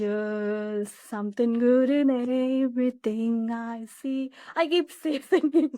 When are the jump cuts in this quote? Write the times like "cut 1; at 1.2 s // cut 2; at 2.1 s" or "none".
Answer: none